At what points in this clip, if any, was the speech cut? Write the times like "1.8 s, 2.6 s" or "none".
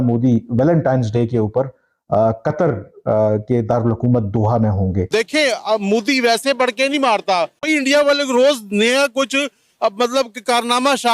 5.1 s, 7.6 s